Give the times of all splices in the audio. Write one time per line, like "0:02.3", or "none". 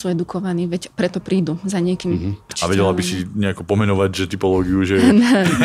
0:02.6